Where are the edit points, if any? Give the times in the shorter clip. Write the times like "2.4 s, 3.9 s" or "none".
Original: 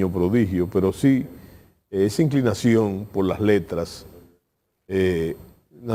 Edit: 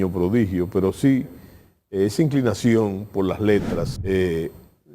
3.9 s

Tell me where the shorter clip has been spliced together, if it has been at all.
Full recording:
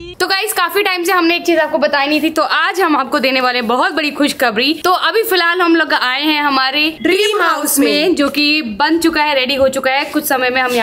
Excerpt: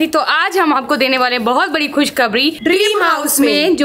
2.6 s

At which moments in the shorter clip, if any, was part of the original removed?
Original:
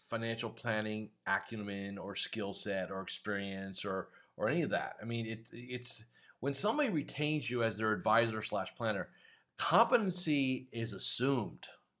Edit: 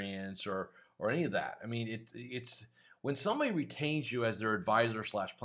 none

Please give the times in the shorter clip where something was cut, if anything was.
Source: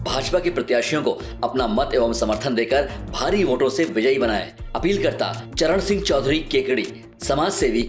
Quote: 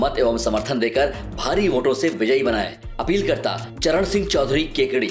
none

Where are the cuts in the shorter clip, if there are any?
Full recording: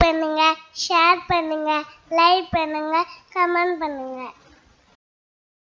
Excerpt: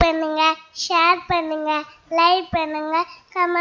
none

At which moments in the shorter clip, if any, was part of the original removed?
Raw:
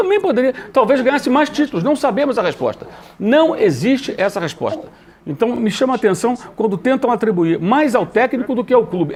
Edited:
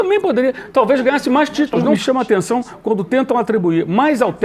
2.0 s

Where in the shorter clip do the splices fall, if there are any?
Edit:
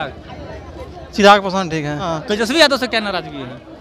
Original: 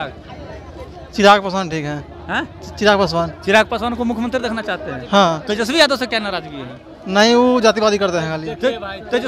2.2 s

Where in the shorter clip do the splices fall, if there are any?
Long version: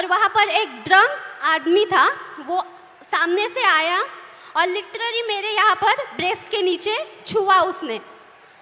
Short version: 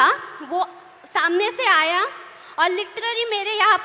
none

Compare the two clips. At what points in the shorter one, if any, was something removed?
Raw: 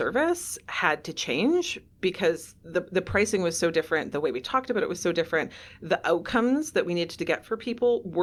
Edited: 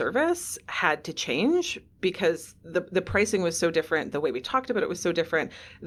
none

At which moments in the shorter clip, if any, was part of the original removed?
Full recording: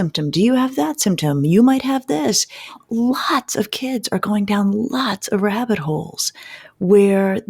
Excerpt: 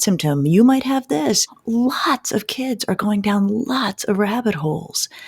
1.5 s

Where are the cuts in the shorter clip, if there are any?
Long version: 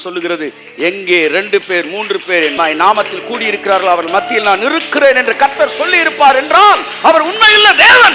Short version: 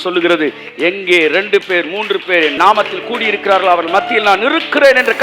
2.5 s

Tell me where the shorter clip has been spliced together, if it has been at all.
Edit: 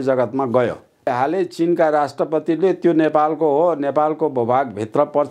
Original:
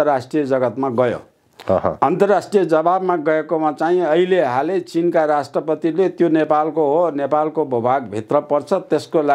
1.1 s

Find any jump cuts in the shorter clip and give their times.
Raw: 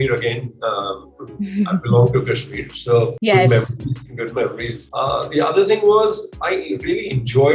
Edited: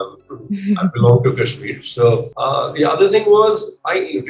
2.3 s

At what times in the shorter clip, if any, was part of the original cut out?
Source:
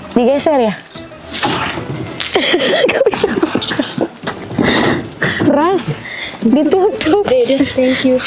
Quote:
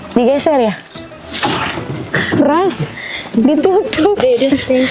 2.0 s

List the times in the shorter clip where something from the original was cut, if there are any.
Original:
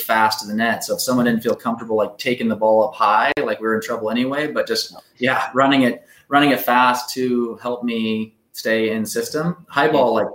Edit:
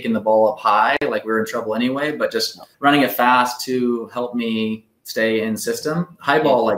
2.6 s

